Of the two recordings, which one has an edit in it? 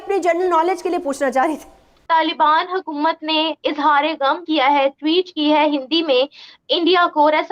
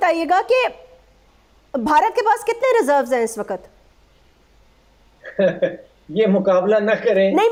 first; 1 cut; at 1.9 s

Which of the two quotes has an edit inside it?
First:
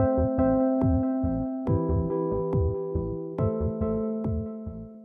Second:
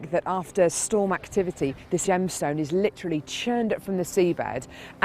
second; 1 cut; at 1.7 s

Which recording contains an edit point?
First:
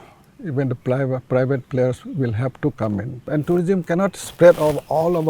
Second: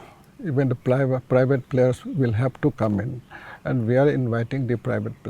first; 1 cut; at 3.2 s

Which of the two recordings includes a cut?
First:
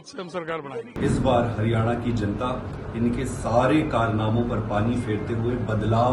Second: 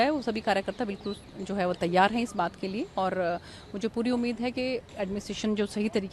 first; 1 cut; at 0.9 s

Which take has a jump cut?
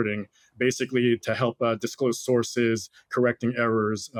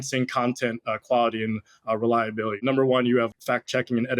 second; 2 cuts; at 2.6 s, 3.3 s

